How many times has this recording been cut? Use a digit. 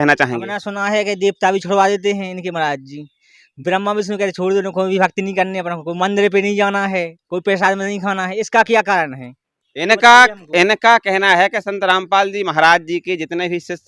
0